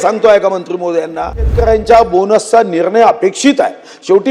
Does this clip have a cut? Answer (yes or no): yes